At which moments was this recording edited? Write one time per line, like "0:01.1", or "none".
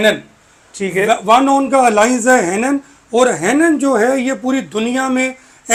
none